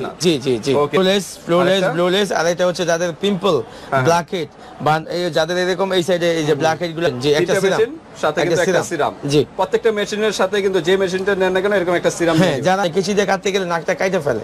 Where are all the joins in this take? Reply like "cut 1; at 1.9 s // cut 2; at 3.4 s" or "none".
cut 1; at 1.0 s // cut 2; at 7.1 s // cut 3; at 12.8 s